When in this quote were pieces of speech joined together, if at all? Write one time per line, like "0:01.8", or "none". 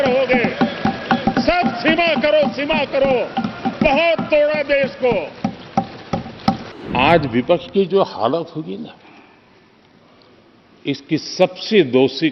0:06.7